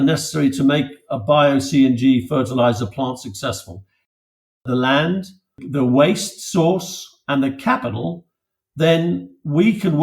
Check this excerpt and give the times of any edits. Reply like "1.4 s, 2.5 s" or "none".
4.4 s, 5.6 s